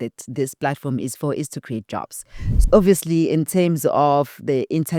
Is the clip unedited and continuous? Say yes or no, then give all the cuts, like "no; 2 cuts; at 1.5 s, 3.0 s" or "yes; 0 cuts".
no; 1 cut; at 2.6 s